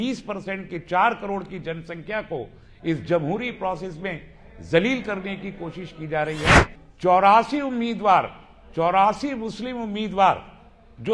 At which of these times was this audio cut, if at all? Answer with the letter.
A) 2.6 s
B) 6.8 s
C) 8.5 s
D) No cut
B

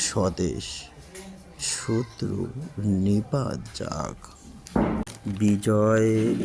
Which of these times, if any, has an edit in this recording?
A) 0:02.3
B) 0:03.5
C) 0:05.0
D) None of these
C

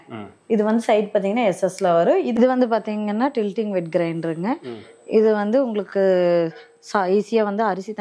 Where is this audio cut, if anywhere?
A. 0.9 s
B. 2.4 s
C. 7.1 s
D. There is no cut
B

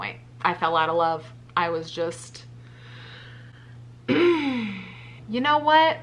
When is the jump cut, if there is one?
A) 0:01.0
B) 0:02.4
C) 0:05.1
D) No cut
C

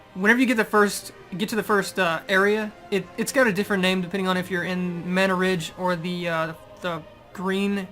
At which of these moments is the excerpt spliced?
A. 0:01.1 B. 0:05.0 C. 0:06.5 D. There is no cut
B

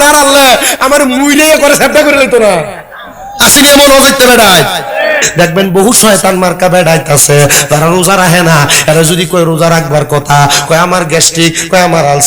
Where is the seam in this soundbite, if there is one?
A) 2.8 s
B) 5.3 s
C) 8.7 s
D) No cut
B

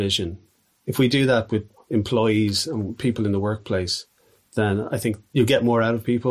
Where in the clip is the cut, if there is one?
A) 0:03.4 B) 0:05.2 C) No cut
B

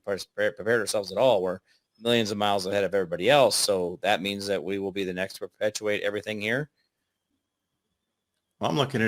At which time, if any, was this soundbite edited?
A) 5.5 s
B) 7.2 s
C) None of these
B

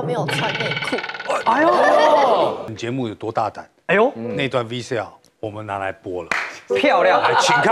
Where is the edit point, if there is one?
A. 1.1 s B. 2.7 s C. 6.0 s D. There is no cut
B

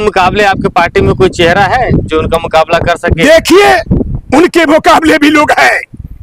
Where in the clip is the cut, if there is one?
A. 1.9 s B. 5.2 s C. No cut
C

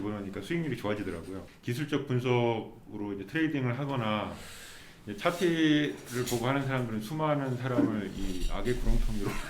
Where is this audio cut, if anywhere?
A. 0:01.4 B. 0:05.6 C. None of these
A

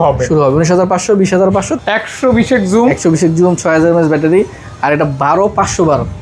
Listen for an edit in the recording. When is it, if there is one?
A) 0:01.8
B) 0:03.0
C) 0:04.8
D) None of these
A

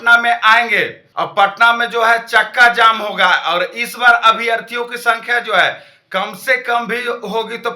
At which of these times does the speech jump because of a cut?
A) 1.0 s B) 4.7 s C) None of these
A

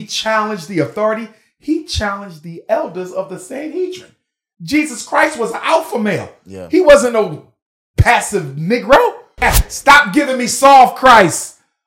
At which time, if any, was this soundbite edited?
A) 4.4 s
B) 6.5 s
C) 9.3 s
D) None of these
C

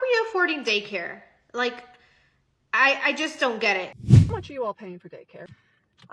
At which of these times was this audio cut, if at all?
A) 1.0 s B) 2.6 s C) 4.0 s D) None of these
C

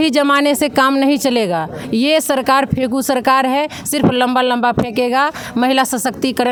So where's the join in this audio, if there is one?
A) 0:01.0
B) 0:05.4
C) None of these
C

